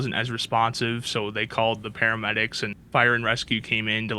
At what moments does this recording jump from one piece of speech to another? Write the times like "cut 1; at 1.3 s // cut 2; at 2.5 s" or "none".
cut 1; at 2.7 s

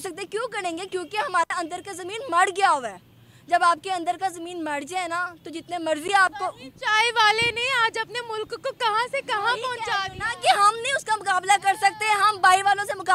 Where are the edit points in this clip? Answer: none

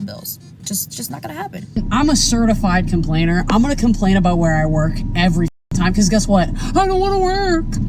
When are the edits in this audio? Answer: cut 1; at 1.6 s

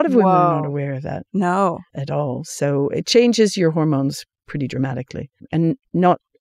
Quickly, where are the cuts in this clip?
cut 1; at 1.9 s // cut 2; at 5.4 s

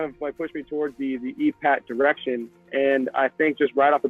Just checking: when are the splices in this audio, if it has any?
none

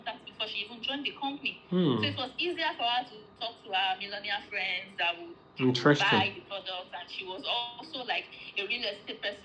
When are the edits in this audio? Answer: none

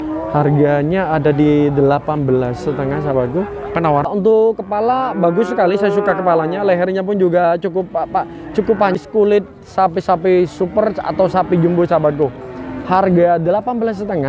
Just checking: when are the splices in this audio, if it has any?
cut 1; at 4.1 s // cut 2; at 9.0 s

